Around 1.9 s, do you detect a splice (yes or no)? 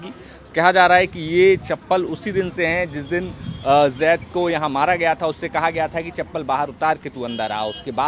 no